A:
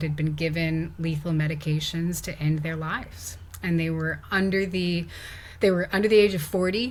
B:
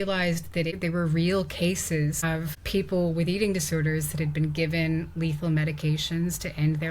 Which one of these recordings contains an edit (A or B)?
B